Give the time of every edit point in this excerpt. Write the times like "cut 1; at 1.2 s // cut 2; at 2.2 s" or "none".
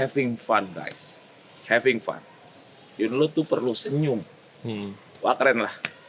none